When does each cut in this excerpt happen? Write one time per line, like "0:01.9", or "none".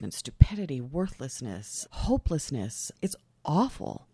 0:01.7
0:02.8